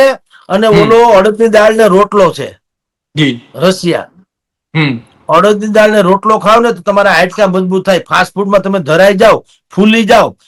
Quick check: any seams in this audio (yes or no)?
no